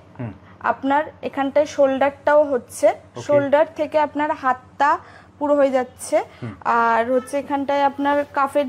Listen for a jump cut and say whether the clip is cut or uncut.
uncut